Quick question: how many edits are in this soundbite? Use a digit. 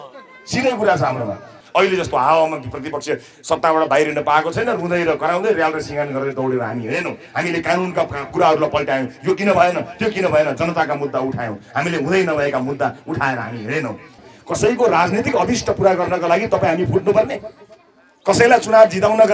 2